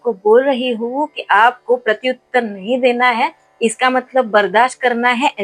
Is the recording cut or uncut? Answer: uncut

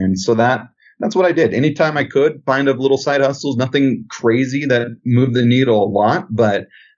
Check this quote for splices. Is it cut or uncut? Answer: uncut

